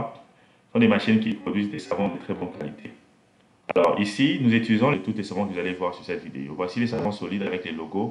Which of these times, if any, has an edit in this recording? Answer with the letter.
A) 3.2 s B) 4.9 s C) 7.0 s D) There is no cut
B